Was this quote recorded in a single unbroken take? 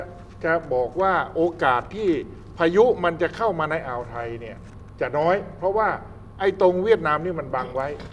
yes; 0 cuts

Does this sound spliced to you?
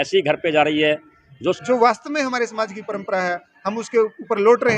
yes; 1 cut; at 1.6 s

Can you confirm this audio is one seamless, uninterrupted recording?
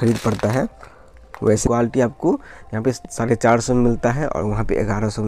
no; 1 cut; at 1.7 s

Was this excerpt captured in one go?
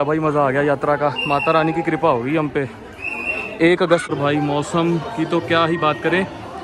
no; 1 cut; at 4.1 s

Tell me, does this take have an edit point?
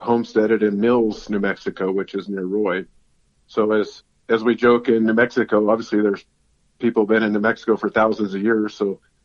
yes; 1 cut; at 4.0 s

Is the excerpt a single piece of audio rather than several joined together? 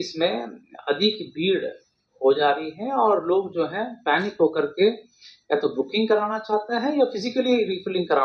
yes; 0 cuts

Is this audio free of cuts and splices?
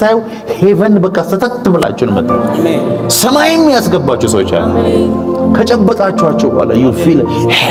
yes; 0 cuts

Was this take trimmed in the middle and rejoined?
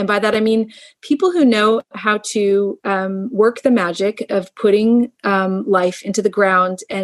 no; 0 cuts

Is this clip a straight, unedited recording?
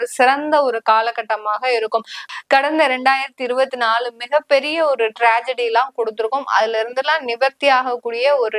no; 1 cut; at 2.2 s

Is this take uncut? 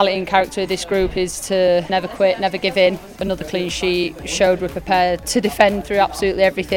no; 4 cuts; at 1.9 s, 3.1 s, 4.2 s, 5.2 s

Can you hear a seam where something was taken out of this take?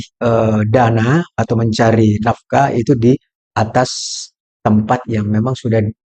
no; 0 cuts

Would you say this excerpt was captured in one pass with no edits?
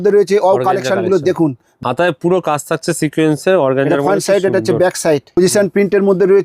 no; 2 cuts; at 1.7 s, 5.4 s

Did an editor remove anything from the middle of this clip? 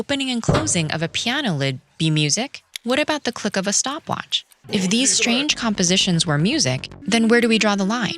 yes; 3 cuts; at 2.6 s, 4.5 s, 6.9 s

